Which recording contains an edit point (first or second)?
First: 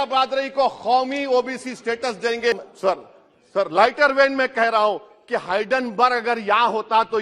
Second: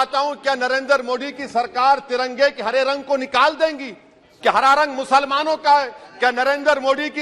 first